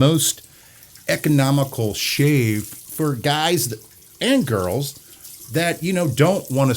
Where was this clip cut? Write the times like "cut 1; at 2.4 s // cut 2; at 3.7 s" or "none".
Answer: cut 1; at 2.8 s